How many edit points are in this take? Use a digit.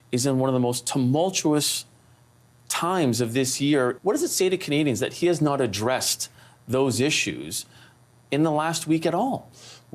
1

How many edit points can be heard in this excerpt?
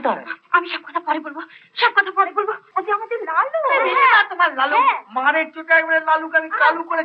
1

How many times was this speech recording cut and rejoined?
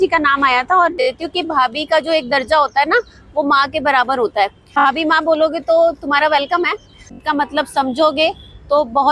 3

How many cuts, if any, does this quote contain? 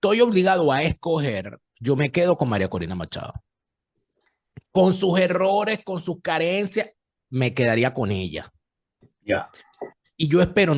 0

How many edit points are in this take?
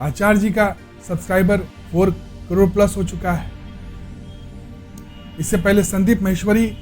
1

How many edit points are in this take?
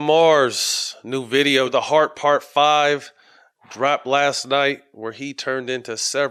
0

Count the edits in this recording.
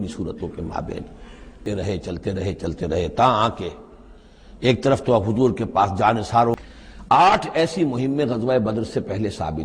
2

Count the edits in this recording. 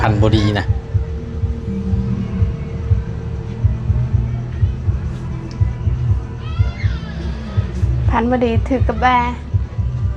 0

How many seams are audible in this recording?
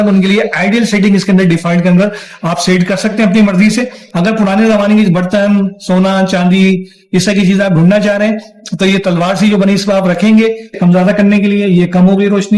2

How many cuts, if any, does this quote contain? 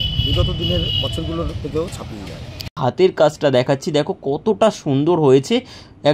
1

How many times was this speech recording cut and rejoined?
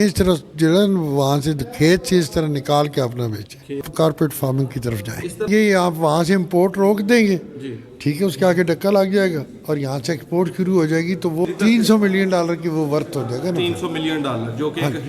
3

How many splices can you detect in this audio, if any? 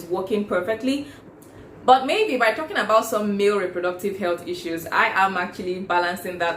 1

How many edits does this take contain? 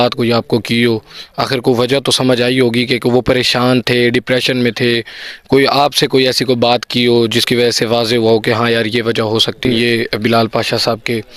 1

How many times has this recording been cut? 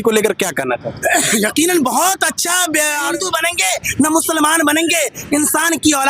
1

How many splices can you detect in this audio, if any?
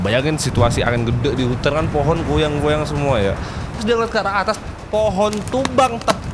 1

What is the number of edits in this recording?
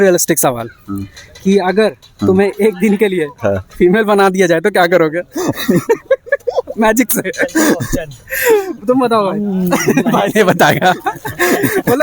0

